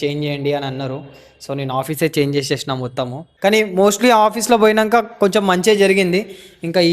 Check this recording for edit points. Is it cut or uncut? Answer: cut